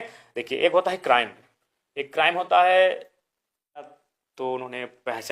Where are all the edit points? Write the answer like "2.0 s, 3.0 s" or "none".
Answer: 4.0 s